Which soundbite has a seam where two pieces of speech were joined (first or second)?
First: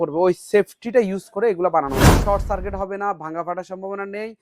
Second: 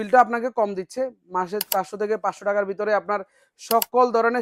first